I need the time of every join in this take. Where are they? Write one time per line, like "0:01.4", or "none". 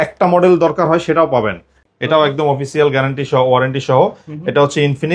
0:01.8